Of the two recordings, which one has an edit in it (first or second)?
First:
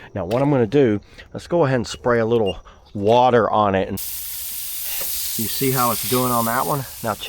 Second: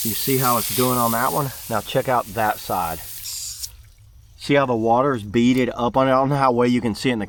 first